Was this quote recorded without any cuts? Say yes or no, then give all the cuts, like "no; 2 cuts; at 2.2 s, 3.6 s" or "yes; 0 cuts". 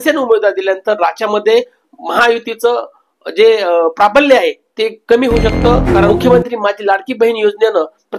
no; 1 cut; at 6.1 s